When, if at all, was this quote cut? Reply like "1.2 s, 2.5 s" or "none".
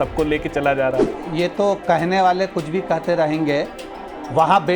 1.2 s

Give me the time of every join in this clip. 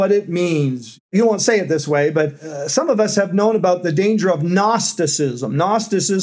1.1 s, 2.5 s

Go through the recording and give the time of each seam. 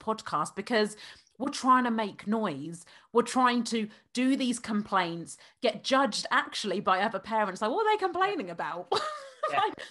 none

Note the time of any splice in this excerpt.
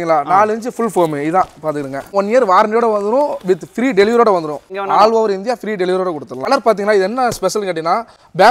2.1 s, 4.7 s, 6.4 s

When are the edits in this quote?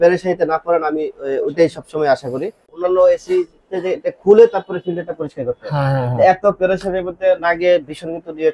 2.8 s

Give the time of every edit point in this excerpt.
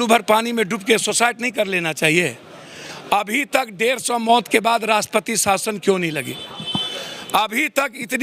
none

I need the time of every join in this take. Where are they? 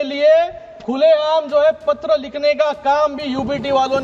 none

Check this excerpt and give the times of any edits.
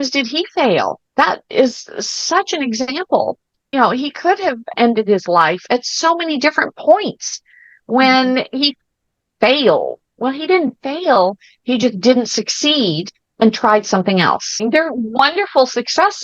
14.5 s

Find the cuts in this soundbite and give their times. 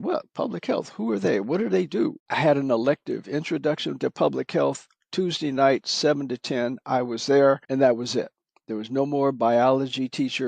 7.6 s

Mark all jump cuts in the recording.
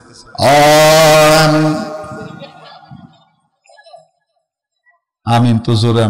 none

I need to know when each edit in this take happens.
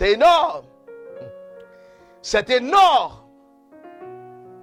none

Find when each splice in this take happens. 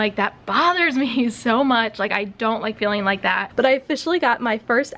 3.5 s

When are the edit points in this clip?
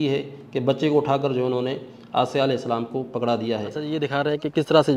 3.7 s

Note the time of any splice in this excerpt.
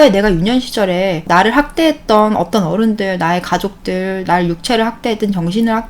1.2 s

